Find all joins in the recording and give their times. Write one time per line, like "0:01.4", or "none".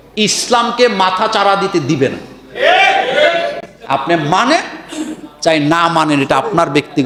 none